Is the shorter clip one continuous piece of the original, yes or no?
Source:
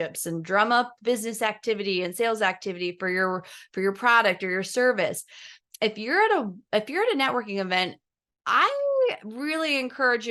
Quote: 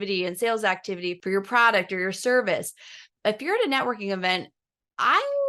no